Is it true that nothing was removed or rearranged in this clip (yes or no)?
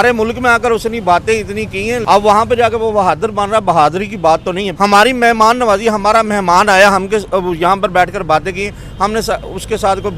no